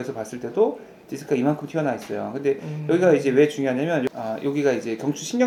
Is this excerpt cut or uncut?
uncut